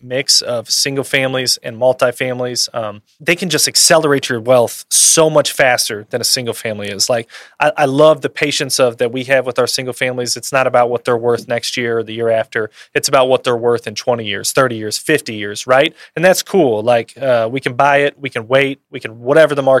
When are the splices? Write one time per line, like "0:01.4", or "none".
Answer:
0:03.1